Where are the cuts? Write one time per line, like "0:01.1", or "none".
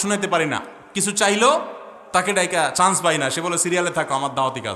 none